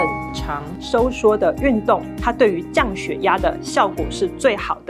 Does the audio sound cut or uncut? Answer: uncut